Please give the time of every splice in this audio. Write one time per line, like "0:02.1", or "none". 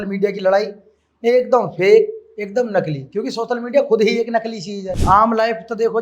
0:04.9